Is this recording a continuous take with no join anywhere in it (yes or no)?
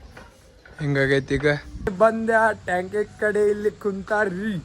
no